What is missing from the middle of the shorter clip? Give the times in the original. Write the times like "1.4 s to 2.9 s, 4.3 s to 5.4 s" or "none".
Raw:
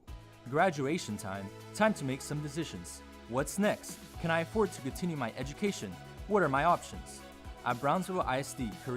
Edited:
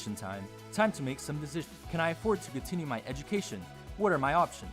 2.8 s to 4.1 s